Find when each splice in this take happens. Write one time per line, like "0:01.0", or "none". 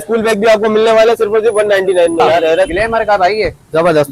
0:02.7